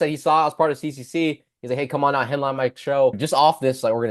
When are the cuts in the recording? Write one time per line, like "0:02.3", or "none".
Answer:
0:03.2